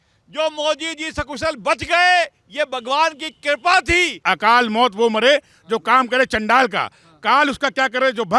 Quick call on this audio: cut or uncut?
cut